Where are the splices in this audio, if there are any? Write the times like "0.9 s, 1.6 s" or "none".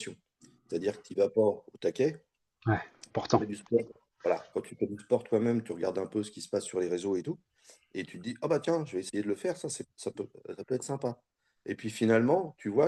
none